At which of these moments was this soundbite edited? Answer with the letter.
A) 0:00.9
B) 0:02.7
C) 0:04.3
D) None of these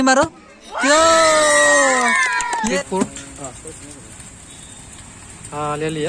B